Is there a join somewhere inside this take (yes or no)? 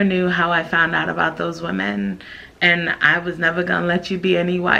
no